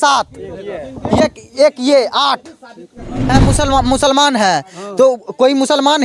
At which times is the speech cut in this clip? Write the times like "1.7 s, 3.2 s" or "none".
3.3 s

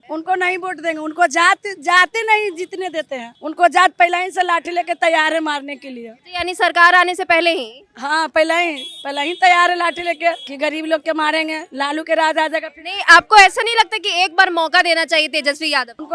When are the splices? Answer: none

